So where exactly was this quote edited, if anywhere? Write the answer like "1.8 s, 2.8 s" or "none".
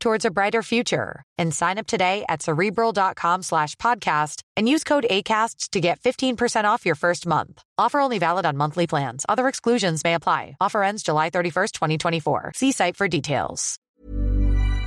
13.8 s